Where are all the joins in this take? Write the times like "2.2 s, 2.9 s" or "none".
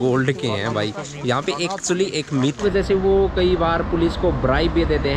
2.6 s

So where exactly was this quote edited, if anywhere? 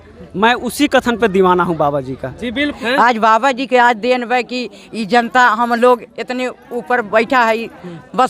2.6 s

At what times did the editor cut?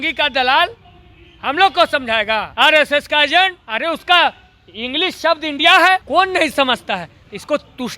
2.5 s, 3.6 s, 6.0 s

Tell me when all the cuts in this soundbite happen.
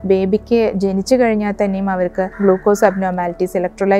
2.3 s

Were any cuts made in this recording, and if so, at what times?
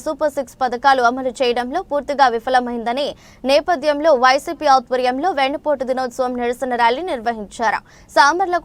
none

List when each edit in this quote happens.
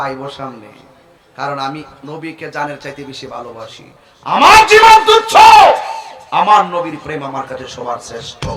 none

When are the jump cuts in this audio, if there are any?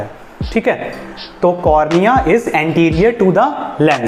none

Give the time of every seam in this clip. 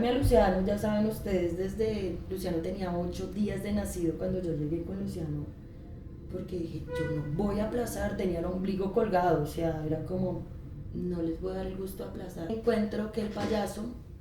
12.5 s

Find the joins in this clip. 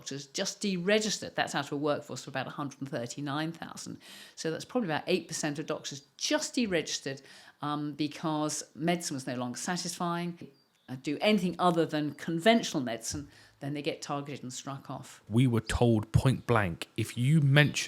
10.6 s, 15.2 s

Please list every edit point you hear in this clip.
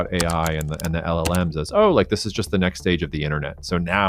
none

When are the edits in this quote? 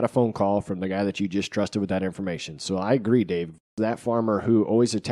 3.7 s

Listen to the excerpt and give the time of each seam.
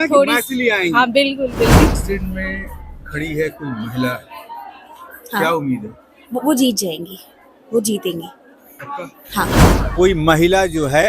1.9 s, 9.8 s

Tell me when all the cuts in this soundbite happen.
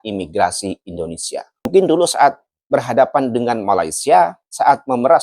1.7 s

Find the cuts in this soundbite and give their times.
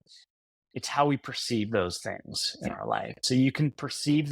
3.2 s

